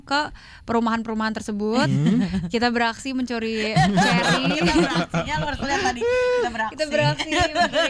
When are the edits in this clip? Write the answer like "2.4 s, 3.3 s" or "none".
none